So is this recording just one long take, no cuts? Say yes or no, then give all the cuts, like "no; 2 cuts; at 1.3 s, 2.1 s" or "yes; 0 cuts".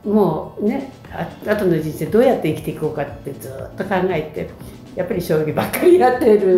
yes; 0 cuts